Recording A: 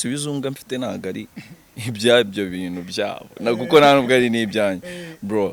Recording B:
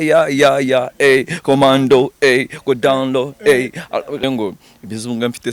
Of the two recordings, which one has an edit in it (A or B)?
B